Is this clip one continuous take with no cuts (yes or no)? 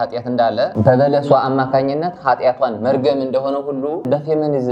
yes